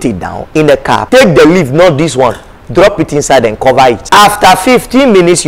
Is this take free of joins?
no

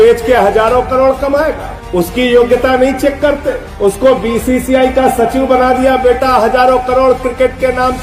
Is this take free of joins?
yes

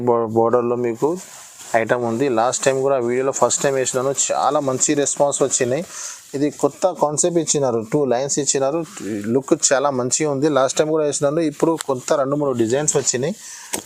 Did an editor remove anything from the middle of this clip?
no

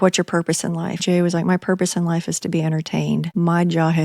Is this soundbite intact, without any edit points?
no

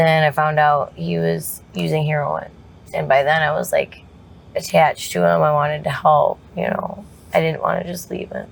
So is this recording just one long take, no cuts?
yes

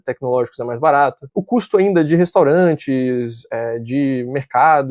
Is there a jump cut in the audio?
no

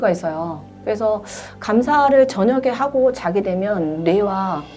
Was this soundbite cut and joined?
no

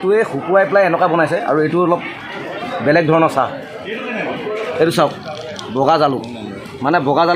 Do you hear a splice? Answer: yes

